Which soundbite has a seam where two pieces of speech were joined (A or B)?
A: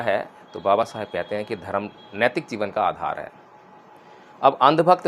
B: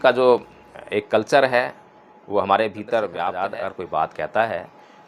B